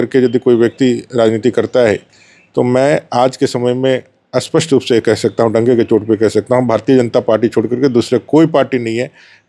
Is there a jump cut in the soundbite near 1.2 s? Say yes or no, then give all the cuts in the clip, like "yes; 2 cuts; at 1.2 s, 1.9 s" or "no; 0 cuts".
no; 0 cuts